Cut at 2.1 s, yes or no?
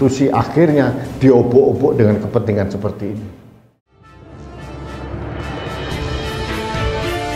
no